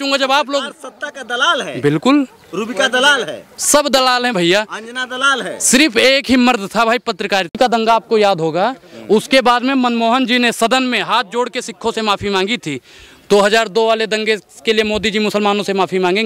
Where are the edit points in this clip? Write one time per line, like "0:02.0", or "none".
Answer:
0:07.6